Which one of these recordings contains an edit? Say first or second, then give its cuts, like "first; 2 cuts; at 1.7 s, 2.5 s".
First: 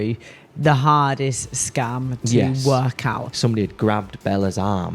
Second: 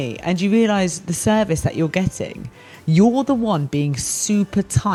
first; 1 cut; at 3.2 s